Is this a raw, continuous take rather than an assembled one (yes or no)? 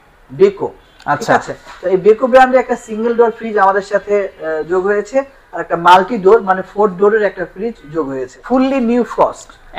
no